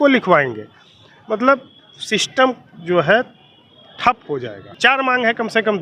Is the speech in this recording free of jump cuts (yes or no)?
no